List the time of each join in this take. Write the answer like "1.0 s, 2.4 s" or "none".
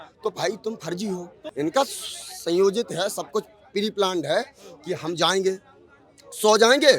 1.4 s

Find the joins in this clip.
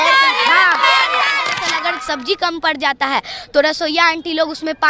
1.7 s

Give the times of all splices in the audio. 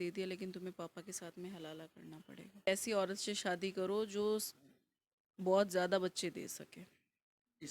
2.7 s

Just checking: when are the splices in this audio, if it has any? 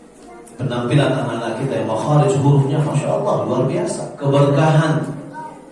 4.1 s

